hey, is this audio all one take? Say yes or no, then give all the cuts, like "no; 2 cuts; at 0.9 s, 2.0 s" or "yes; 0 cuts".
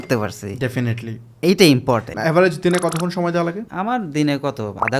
no; 2 cuts; at 2.1 s, 3.7 s